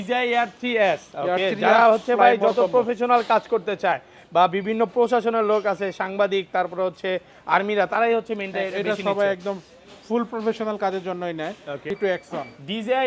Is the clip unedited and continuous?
no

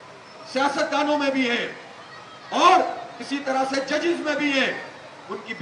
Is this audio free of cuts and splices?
yes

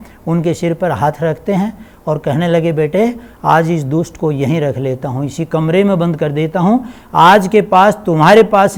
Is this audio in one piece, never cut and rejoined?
yes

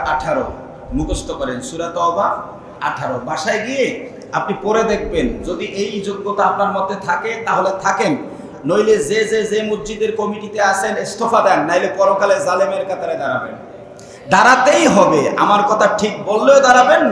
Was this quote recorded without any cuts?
no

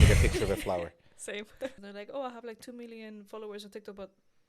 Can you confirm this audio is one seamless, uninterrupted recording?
no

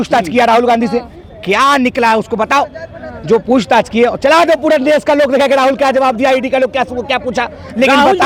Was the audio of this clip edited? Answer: no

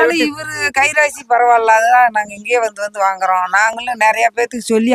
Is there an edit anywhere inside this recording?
no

